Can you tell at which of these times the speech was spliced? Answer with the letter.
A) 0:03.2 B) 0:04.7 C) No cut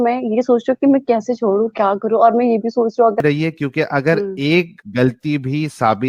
A